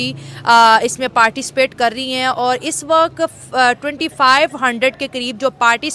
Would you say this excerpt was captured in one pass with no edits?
yes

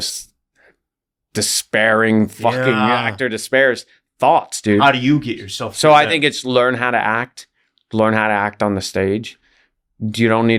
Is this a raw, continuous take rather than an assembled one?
yes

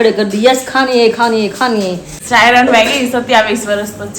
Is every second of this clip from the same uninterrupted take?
no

